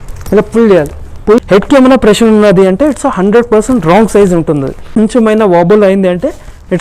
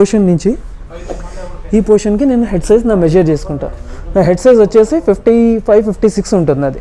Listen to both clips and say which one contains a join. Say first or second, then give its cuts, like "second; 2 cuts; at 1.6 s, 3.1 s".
first; 2 cuts; at 1.4 s, 4.8 s